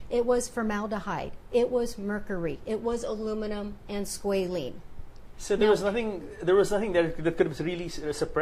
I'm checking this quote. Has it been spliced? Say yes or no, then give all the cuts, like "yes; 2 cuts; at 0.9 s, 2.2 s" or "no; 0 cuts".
no; 0 cuts